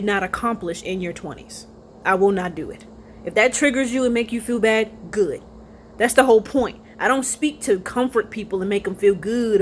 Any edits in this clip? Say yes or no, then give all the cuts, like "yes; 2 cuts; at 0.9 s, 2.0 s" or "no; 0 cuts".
no; 0 cuts